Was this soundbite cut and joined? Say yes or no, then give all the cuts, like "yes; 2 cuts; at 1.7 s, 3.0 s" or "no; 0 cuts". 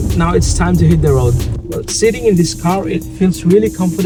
no; 0 cuts